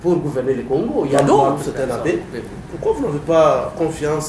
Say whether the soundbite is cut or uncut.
cut